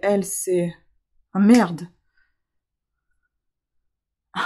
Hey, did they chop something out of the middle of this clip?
no; 0 cuts

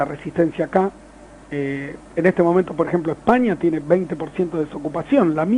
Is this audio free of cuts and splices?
yes; 0 cuts

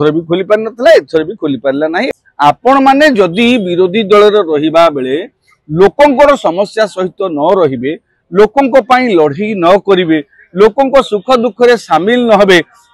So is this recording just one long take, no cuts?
no; 1 cut; at 2.1 s

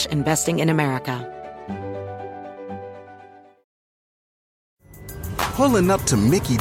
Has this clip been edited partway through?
yes; 1 cut; at 1.2 s

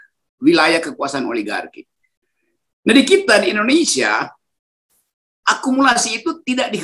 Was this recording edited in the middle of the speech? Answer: yes; 1 cut; at 2.0 s

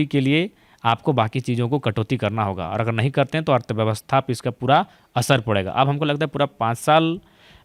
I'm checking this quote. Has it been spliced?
no; 0 cuts

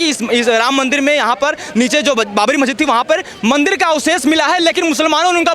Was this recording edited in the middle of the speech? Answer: no; 0 cuts

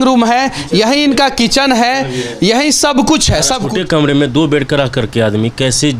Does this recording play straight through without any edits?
no; 1 cut; at 3.6 s

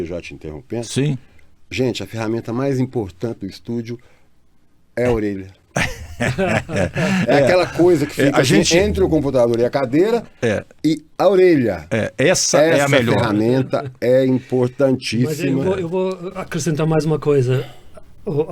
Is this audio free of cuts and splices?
yes; 0 cuts

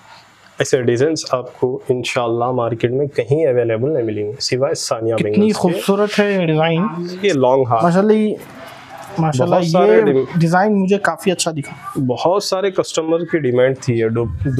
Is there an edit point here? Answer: yes; 1 cut; at 7.2 s

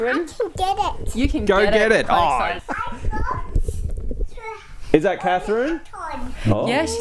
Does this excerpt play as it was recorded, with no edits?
no; 1 cut; at 2.6 s

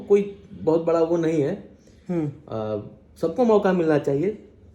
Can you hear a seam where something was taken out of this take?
no; 0 cuts

